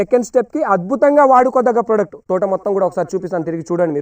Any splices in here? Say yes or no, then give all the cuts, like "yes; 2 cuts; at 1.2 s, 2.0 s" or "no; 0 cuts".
yes; 1 cut; at 2.2 s